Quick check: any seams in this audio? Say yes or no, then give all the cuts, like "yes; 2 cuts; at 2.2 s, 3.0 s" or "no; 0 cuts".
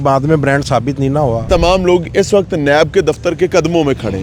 yes; 1 cut; at 1.5 s